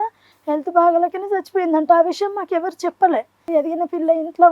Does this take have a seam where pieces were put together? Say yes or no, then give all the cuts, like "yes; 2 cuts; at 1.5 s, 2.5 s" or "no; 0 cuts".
yes; 1 cut; at 3.5 s